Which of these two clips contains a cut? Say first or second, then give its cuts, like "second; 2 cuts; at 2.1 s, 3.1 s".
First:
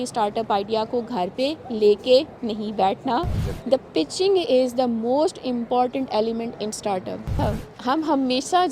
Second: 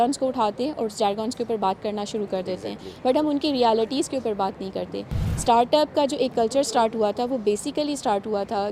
first; 2 cuts; at 3.4 s, 7.4 s